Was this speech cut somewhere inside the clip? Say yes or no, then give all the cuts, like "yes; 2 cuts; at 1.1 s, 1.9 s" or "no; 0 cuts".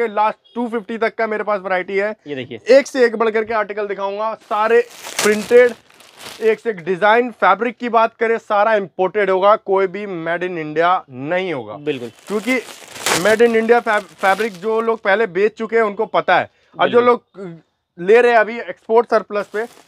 no; 0 cuts